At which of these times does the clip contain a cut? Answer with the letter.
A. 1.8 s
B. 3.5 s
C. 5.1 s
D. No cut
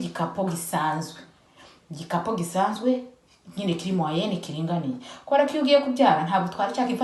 D